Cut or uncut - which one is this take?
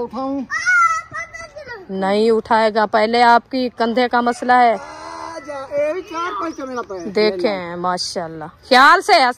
uncut